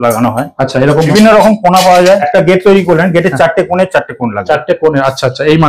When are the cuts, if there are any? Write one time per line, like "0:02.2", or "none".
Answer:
0:01.1
0:02.2